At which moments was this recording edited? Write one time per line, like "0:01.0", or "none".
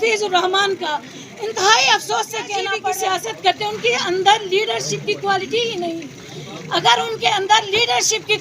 0:02.9